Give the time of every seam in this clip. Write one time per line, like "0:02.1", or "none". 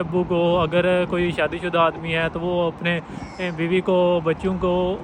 none

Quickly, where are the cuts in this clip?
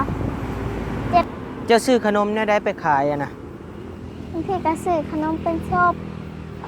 0:01.3

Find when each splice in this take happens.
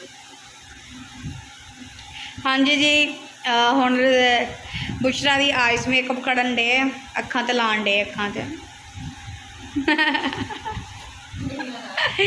none

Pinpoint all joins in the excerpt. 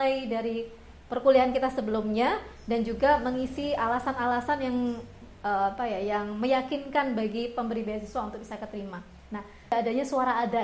0:09.7

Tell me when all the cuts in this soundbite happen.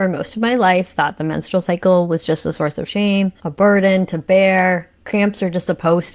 0:03.4

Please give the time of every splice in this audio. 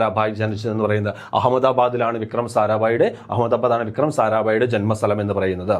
none

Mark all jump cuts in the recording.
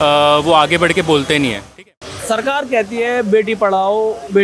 0:01.6

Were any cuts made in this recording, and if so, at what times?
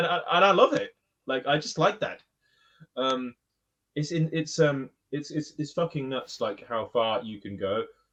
none

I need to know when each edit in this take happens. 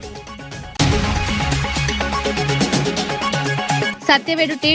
0:00.7
0:02.1
0:03.5

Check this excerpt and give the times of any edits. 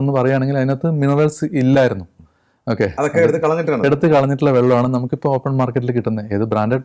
none

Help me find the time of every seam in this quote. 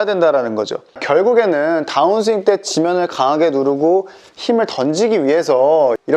0:00.9

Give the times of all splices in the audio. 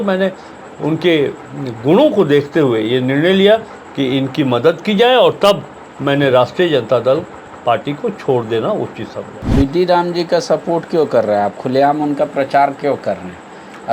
0:09.5

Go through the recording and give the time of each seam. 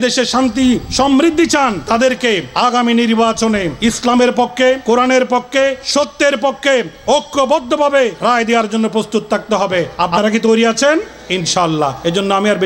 0:00.9
0:01.8
0:02.5
0:03.7
0:04.8
0:05.8
0:08.2
0:10.0
0:11.8

